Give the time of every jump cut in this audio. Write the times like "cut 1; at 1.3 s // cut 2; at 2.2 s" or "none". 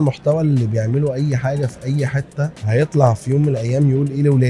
cut 1; at 2.6 s